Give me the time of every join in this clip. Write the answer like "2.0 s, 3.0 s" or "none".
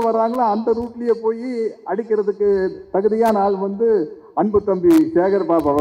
none